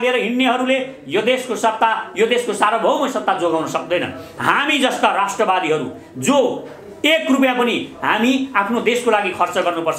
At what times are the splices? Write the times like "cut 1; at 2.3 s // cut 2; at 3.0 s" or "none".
none